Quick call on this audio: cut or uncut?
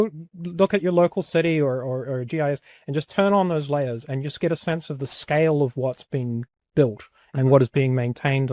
uncut